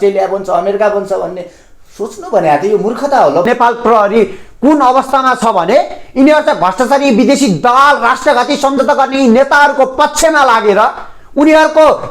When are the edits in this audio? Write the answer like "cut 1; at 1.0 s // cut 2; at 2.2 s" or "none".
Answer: cut 1; at 3.4 s